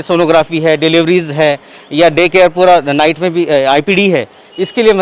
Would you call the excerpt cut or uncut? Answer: uncut